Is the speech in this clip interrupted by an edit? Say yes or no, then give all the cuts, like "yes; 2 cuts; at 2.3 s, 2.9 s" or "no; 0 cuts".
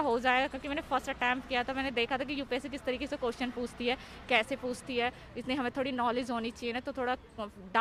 no; 0 cuts